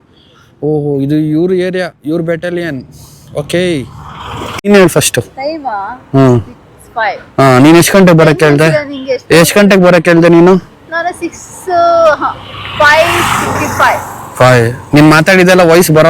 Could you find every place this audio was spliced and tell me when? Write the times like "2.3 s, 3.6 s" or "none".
4.7 s